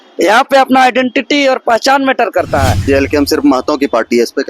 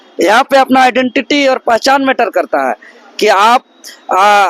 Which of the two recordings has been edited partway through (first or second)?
first